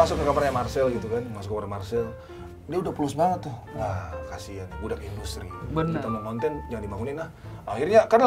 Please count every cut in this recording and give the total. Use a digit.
1